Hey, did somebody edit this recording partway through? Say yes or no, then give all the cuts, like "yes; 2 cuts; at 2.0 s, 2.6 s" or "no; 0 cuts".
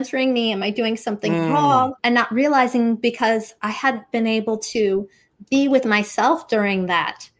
yes; 1 cut; at 1.9 s